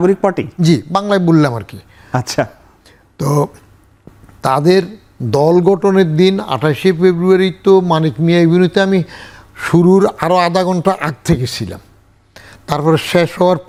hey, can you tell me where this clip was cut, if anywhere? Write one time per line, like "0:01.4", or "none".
none